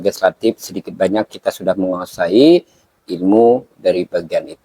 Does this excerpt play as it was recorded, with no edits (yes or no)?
yes